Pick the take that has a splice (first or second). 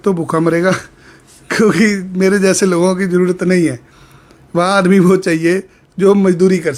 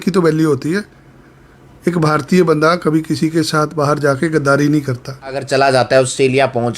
second